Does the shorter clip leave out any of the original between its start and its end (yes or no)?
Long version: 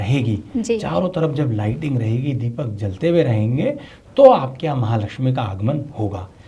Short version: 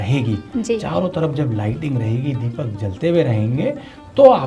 no